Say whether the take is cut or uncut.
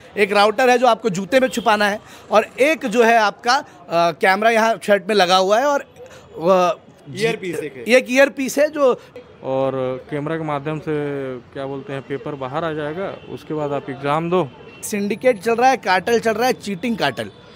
cut